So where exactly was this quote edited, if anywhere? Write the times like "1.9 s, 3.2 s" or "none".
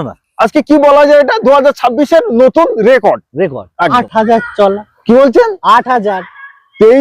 3.9 s